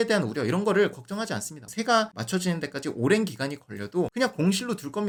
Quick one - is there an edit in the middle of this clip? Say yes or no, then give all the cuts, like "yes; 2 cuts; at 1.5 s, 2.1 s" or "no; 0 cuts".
no; 0 cuts